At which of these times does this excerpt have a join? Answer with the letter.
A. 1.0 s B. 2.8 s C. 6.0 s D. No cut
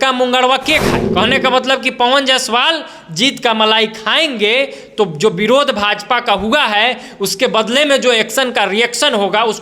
A